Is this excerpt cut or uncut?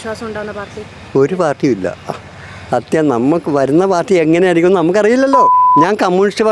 cut